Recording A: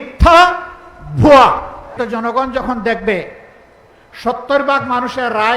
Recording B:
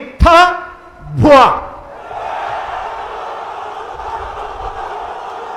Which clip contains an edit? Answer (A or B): A